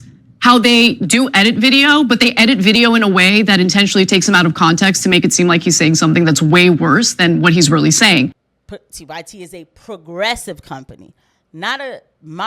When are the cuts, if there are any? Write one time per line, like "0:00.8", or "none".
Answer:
0:08.4